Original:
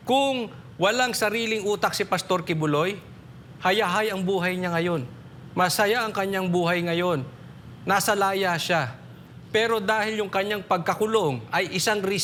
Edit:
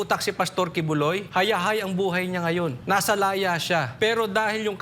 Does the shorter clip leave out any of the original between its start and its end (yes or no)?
yes